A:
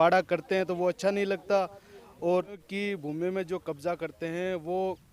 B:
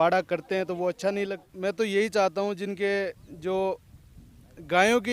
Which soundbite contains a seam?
B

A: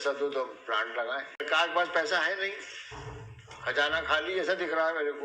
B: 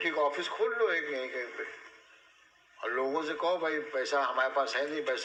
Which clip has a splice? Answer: A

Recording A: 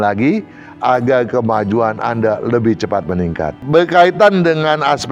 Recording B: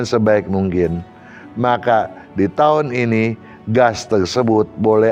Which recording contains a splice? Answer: A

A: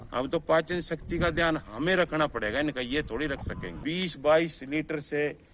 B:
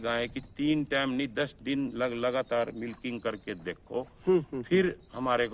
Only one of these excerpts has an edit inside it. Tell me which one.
A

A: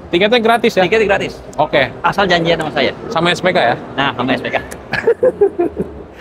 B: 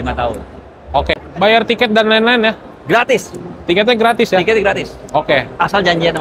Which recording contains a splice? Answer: B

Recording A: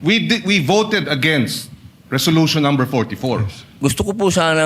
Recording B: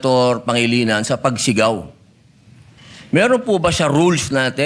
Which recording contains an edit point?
A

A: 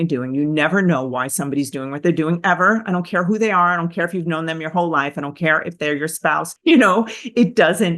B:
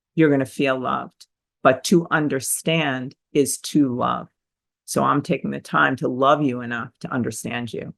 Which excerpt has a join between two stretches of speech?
A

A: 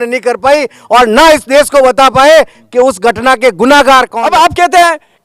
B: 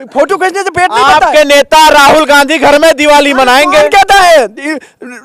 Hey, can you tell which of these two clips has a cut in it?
A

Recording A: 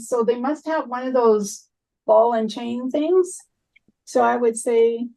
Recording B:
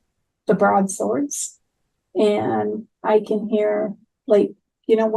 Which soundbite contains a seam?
A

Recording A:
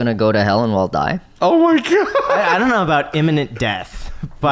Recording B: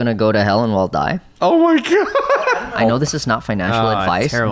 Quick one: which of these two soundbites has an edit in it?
B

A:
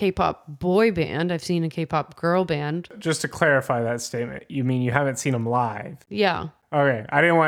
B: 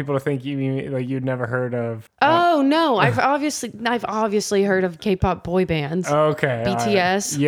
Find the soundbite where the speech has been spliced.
A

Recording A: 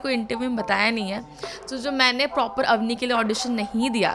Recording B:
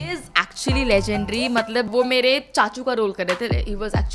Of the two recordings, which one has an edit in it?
B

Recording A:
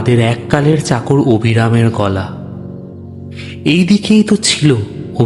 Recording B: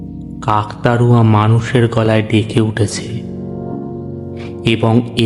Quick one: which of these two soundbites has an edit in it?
B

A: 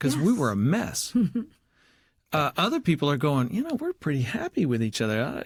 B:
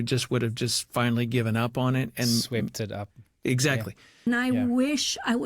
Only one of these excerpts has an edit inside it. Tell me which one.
B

